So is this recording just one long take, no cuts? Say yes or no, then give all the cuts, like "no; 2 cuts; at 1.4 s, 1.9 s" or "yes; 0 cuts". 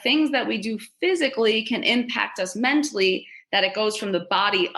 yes; 0 cuts